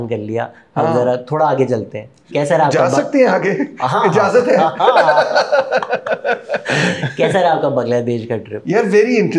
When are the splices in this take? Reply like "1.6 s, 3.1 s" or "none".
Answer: none